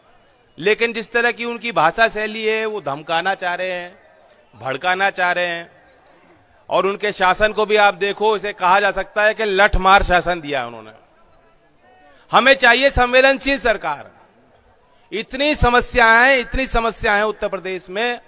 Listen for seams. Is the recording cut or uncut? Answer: uncut